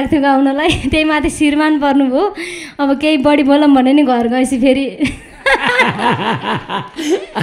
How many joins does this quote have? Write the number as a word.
zero